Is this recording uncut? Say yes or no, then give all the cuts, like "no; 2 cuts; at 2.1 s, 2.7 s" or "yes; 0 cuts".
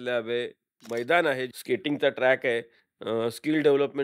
no; 1 cut; at 1.5 s